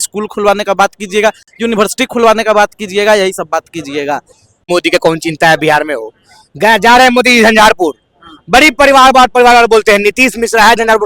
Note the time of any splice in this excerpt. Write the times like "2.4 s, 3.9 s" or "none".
4.7 s